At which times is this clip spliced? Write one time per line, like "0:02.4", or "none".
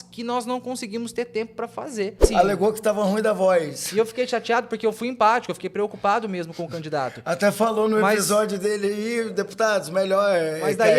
0:02.2